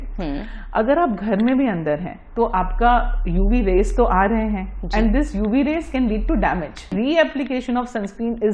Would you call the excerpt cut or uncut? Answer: cut